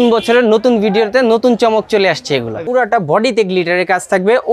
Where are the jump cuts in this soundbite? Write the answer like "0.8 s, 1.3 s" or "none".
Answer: 2.6 s

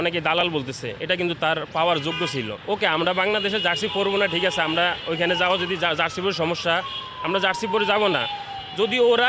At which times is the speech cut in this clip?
2.6 s

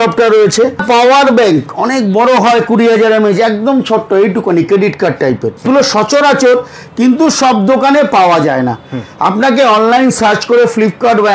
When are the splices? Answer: 0.8 s, 5.7 s

